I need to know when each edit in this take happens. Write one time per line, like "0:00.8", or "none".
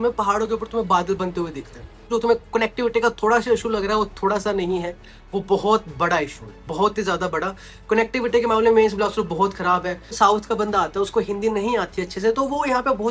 0:02.1
0:10.1